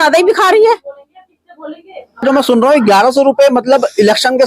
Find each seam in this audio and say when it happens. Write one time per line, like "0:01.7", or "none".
0:02.2